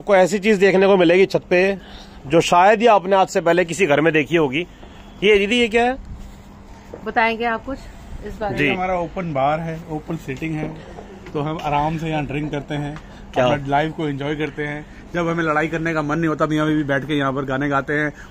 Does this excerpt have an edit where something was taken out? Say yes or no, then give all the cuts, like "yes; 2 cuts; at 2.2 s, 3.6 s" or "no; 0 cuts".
no; 0 cuts